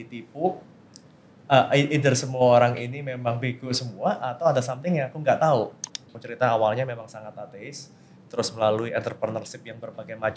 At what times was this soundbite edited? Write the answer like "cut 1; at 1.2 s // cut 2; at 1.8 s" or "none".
cut 1; at 6.2 s